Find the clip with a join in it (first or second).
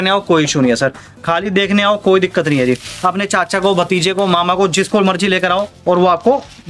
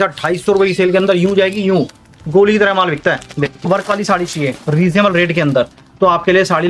second